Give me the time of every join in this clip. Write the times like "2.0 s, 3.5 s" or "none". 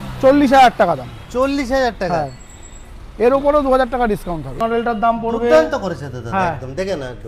4.6 s